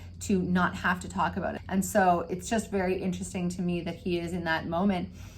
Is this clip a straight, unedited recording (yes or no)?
no